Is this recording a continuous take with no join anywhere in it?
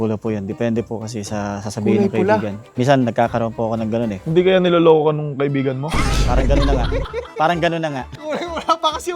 yes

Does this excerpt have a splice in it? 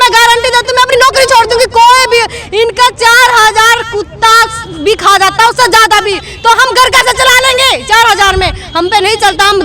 yes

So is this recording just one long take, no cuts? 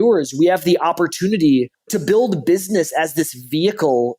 no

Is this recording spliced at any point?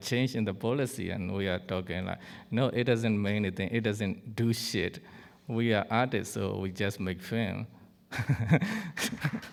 no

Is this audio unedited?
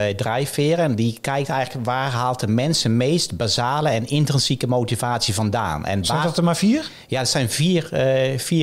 yes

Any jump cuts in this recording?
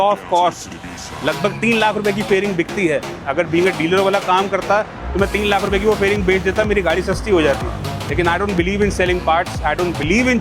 no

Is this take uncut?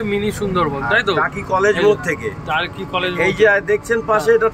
yes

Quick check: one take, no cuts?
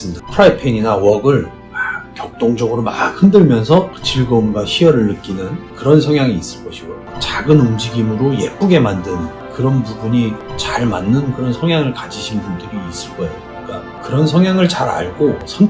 yes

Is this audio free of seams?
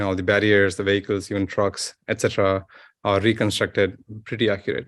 yes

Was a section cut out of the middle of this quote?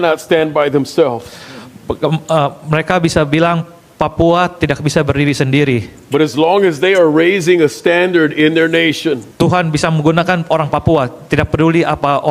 yes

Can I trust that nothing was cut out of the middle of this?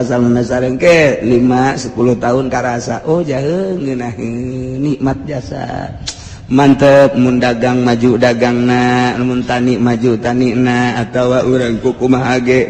yes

